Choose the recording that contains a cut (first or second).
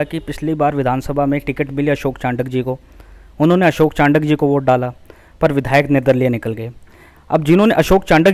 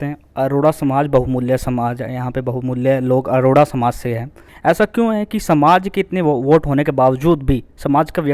second